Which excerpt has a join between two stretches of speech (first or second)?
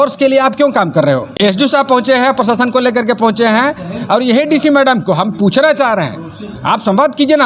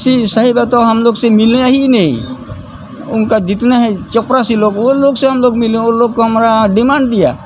first